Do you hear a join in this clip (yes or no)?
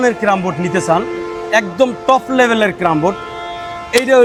no